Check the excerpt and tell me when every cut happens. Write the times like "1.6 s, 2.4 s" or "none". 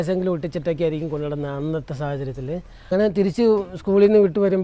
2.9 s